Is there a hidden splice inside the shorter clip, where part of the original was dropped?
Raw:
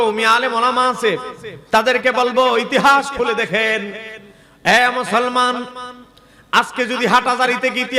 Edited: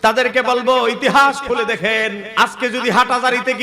yes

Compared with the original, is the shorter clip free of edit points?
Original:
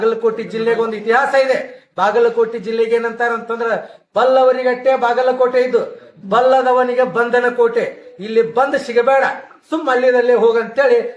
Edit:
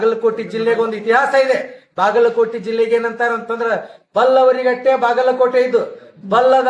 yes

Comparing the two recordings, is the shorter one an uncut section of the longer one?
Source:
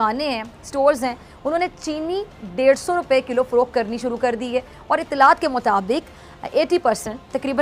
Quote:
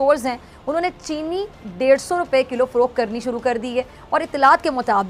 yes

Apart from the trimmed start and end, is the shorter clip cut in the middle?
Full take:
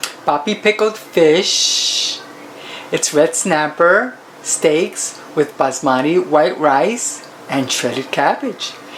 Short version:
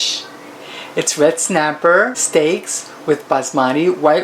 yes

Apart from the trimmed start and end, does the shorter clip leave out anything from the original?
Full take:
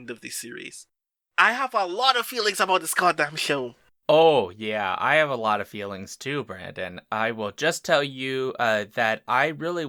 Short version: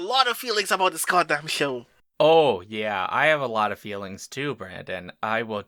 no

